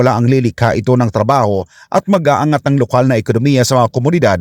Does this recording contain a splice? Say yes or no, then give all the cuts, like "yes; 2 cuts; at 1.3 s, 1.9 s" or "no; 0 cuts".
no; 0 cuts